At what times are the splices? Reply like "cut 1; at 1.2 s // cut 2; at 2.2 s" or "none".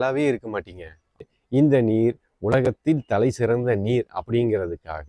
cut 1; at 1.3 s